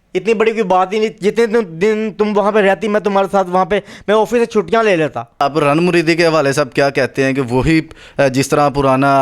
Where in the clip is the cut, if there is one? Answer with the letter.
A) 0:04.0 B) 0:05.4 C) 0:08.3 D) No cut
B